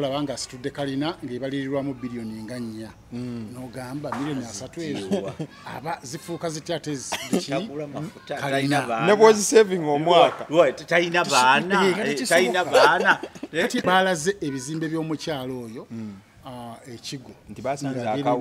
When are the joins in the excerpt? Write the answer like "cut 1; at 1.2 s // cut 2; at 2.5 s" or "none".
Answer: cut 1; at 13.8 s